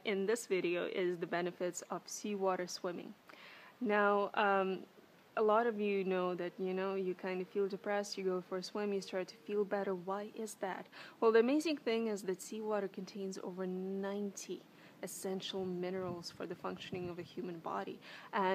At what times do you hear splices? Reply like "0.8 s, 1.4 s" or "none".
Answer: none